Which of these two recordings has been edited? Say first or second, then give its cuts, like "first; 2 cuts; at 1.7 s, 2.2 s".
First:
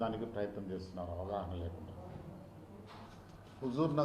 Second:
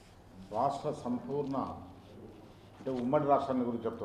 first; 1 cut; at 3.1 s